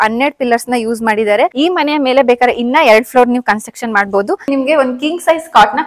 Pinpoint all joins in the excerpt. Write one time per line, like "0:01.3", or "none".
0:01.5
0:04.5

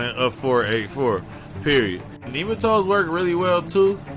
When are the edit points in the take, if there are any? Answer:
0:02.3

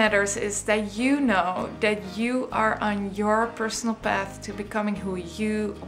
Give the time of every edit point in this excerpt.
none

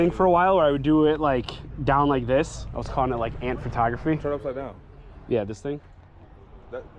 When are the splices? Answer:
none

